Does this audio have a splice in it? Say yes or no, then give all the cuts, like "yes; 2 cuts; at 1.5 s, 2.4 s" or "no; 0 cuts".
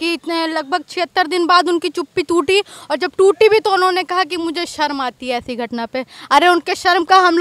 no; 0 cuts